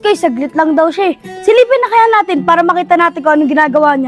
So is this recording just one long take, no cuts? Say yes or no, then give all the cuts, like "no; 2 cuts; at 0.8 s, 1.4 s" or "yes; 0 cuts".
yes; 0 cuts